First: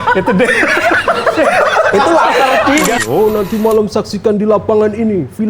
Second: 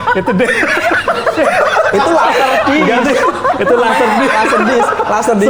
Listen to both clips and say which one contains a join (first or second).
first